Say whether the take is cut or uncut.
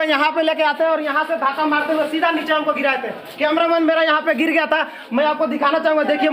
uncut